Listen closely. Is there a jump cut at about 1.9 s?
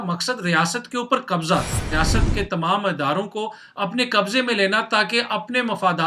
yes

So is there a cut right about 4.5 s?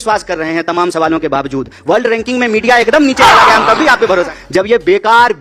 yes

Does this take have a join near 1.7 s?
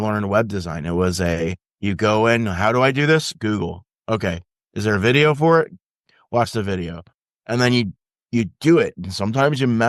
yes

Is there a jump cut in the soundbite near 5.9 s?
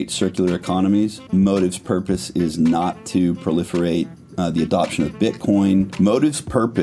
yes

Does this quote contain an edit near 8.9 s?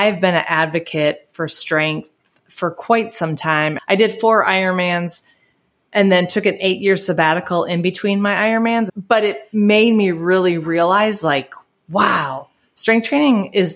yes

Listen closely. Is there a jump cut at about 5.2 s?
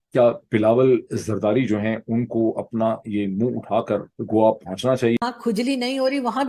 yes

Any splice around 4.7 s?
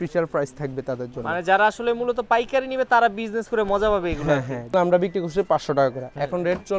yes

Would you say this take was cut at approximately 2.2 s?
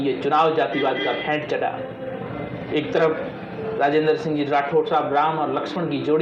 no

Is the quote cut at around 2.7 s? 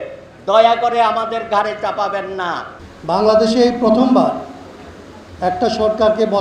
yes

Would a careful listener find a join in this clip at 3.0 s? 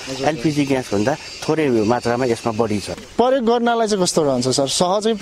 yes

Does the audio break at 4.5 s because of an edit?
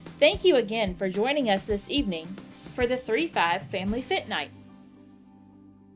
yes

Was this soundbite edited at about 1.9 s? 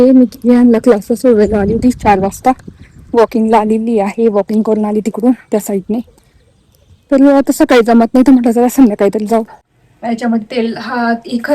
no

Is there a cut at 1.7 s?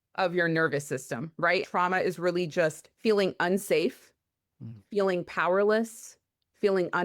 yes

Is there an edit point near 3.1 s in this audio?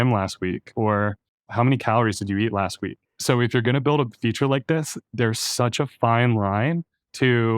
yes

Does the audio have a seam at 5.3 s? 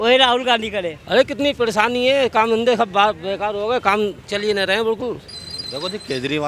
yes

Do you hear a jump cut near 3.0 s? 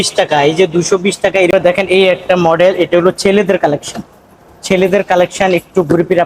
no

